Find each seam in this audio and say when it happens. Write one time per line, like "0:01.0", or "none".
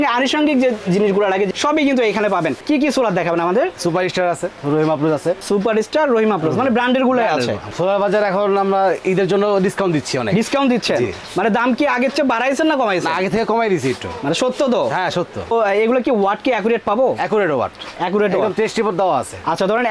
0:01.5
0:02.6
0:04.5
0:05.4
0:07.6
0:15.5